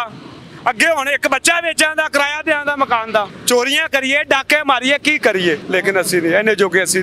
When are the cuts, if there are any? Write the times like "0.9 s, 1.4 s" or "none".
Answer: 3.4 s, 5.6 s